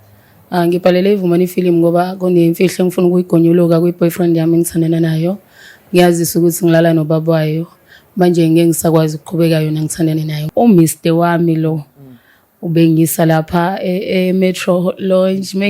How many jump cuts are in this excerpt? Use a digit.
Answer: 1